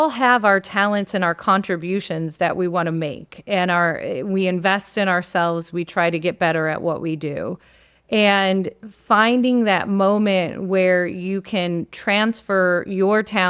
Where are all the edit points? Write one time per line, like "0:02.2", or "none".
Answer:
none